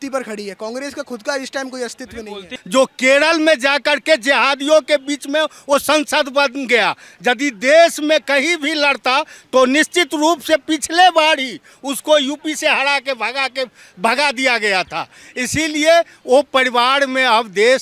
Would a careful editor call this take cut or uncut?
cut